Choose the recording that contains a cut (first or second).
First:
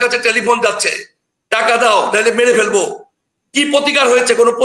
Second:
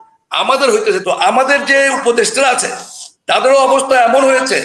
second